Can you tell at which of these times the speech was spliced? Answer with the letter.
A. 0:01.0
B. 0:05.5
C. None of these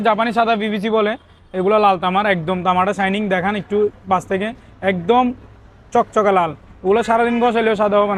C